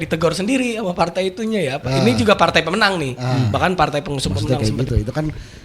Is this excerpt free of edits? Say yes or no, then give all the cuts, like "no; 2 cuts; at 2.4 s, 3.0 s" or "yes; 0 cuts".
no; 1 cut; at 4.4 s